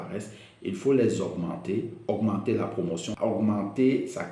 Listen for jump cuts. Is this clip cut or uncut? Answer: cut